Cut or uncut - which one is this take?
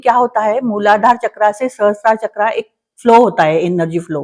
uncut